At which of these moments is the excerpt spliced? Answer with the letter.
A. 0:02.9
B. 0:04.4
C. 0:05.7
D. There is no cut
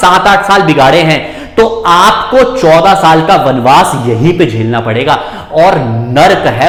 D